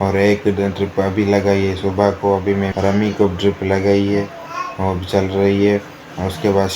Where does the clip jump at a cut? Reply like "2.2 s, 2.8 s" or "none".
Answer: 2.7 s

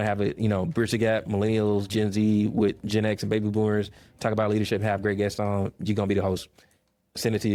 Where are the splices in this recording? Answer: none

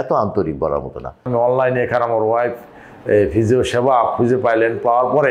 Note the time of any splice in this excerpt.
1.3 s

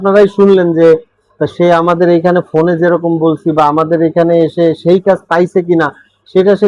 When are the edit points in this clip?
none

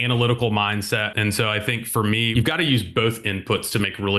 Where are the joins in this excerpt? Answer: 1.1 s, 2.3 s

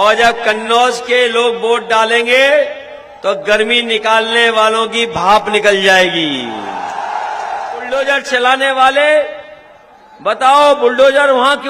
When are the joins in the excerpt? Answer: 7.9 s

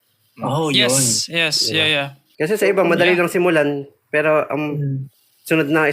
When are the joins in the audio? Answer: 2.2 s

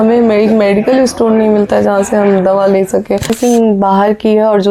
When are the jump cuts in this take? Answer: 3.3 s

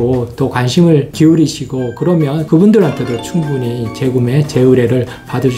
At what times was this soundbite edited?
none

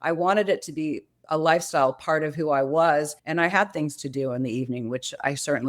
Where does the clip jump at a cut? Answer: 3.2 s

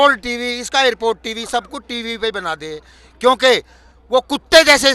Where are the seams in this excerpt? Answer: none

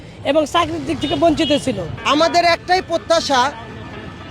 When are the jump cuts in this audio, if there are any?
1.9 s

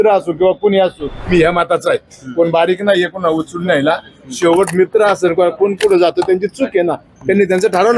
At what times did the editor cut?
1.1 s

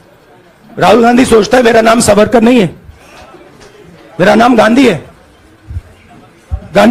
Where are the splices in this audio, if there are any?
none

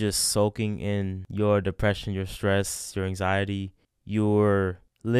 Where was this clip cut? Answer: 1.2 s

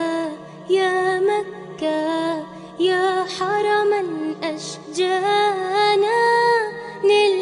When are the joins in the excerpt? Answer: none

